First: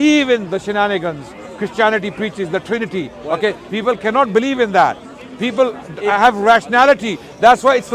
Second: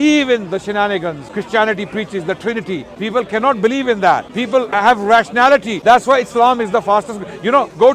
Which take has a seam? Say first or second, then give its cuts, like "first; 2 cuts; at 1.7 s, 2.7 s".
second; 4 cuts; at 1.3 s, 2.9 s, 4.5 s, 5.7 s